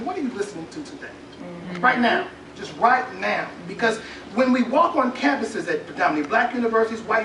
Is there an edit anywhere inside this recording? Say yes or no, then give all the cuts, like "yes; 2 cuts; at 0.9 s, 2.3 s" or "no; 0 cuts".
no; 0 cuts